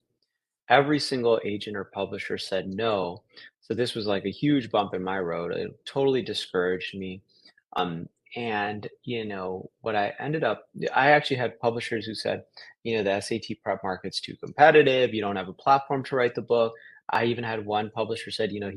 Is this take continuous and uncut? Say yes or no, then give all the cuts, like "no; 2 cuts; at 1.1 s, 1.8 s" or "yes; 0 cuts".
no; 2 cuts; at 7.8 s, 17.2 s